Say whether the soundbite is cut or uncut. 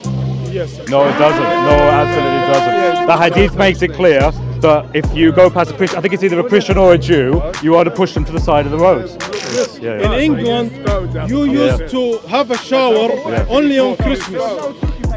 cut